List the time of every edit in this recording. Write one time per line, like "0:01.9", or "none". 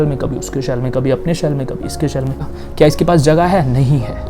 0:02.5